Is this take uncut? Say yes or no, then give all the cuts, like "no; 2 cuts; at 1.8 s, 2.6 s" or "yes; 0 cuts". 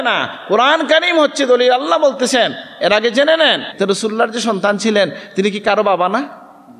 no; 1 cut; at 3.7 s